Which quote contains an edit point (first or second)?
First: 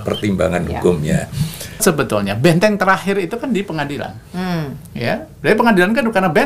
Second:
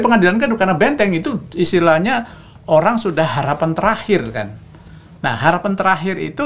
first